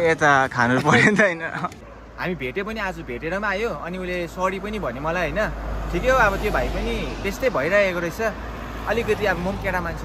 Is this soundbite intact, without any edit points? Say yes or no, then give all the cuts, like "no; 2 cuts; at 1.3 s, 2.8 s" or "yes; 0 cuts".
no; 1 cut; at 1.9 s